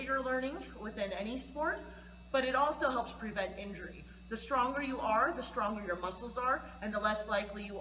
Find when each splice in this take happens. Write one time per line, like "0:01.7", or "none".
none